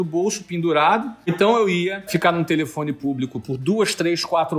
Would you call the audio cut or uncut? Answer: cut